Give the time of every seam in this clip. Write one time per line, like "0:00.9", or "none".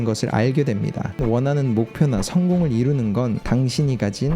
0:01.2